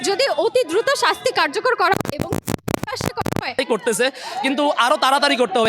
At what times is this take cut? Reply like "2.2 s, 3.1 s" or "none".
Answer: 3.6 s